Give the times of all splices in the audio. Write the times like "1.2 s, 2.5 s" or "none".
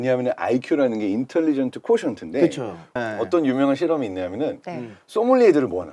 3.0 s